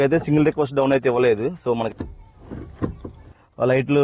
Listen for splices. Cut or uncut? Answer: cut